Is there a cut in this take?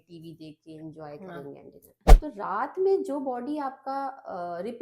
yes; 1 cut; at 2.0 s

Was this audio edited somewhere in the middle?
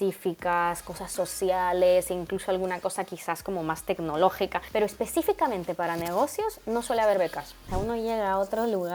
yes; 2 cuts; at 4.6 s, 7.7 s

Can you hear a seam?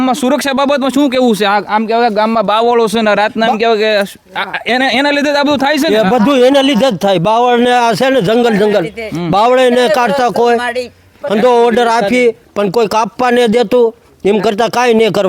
no; 0 cuts

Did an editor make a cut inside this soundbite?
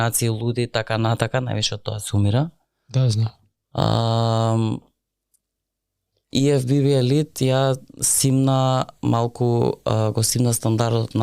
no; 0 cuts

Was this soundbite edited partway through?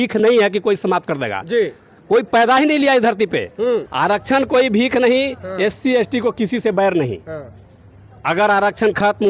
yes; 1 cut; at 3.9 s

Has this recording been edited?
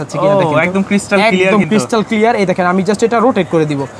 no; 0 cuts

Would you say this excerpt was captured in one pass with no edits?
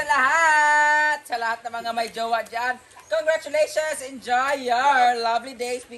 yes; 0 cuts

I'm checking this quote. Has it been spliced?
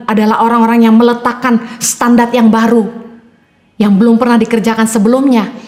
no; 0 cuts

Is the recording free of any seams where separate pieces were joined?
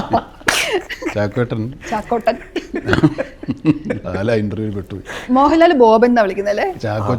yes; 0 cuts

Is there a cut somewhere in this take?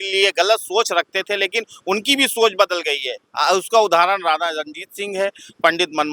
no; 0 cuts

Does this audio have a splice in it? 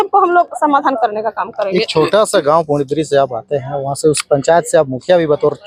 no; 0 cuts

